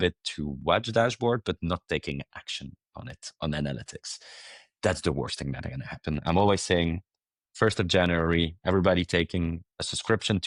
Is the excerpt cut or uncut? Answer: uncut